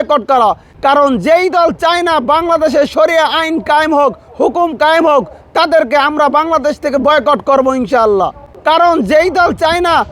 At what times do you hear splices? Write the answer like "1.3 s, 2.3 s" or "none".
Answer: none